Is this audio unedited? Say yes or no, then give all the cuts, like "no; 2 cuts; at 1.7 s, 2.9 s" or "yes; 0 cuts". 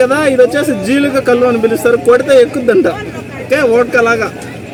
yes; 0 cuts